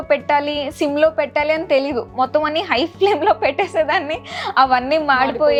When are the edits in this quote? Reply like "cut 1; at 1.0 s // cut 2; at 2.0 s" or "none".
none